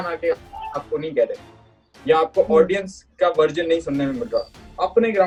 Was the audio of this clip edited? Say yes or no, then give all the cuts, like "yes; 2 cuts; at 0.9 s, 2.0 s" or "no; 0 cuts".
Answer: no; 0 cuts